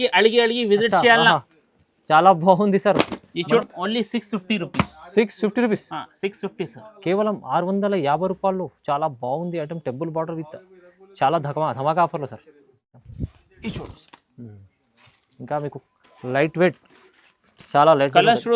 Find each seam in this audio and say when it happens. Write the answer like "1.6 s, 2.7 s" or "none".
3.6 s, 13.0 s